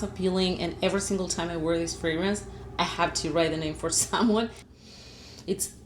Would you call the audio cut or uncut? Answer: cut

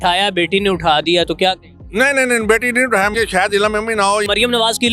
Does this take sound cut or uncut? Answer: cut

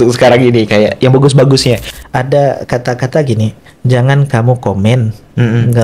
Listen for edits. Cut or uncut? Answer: cut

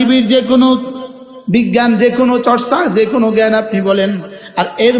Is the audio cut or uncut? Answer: uncut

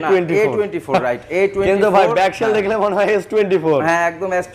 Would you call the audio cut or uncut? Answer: uncut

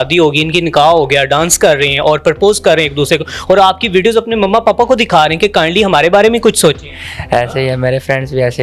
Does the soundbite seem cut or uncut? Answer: uncut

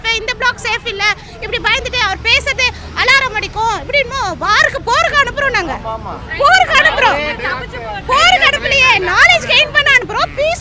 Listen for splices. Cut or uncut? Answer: uncut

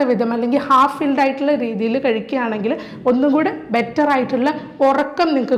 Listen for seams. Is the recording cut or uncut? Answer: uncut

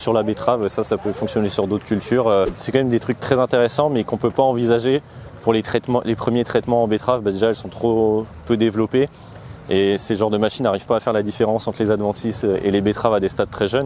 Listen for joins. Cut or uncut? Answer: cut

